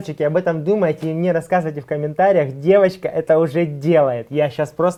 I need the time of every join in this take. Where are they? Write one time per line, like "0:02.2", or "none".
none